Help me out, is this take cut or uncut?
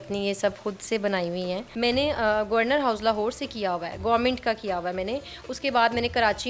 cut